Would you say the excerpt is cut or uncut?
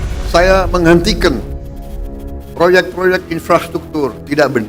uncut